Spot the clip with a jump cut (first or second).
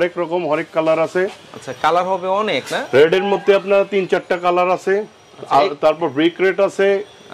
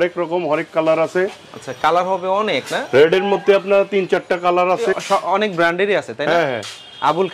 second